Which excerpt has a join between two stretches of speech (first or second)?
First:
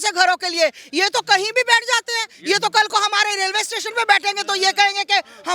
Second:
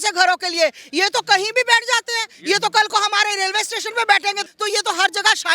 second